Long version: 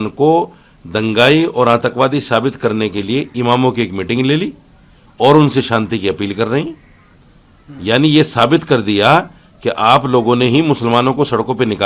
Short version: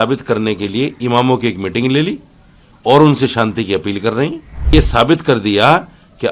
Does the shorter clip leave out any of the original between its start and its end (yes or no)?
yes